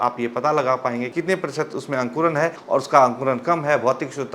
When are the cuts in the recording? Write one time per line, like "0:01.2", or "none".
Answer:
0:01.1
0:02.6